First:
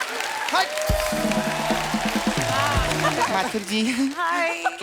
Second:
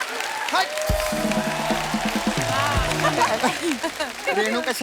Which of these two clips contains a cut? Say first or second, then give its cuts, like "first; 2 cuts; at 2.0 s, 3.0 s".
first; 1 cut; at 3.3 s